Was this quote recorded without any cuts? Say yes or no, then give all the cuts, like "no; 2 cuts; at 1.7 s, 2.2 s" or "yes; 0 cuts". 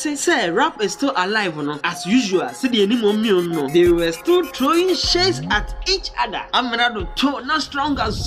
yes; 0 cuts